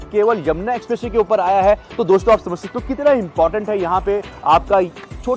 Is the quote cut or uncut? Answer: uncut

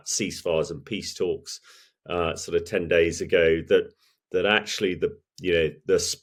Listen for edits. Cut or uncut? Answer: uncut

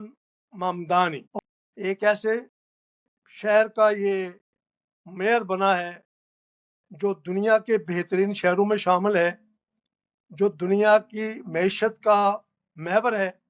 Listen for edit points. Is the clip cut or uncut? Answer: cut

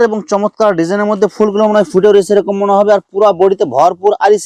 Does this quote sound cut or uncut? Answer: uncut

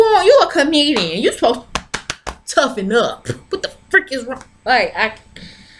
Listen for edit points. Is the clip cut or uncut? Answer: uncut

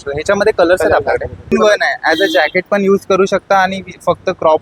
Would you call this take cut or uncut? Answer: cut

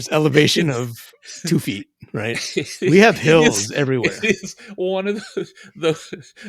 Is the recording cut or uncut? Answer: uncut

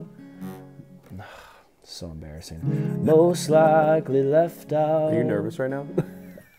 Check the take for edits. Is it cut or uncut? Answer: uncut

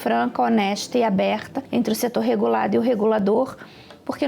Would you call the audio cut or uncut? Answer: cut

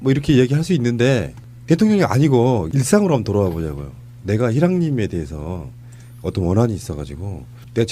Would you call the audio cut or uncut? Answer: uncut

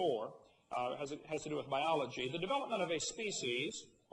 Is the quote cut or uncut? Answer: uncut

